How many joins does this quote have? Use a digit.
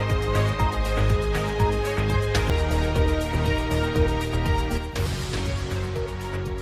1